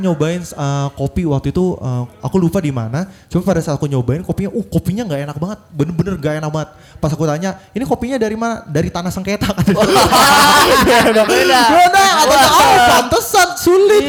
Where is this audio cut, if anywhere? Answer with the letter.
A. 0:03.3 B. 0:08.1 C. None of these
C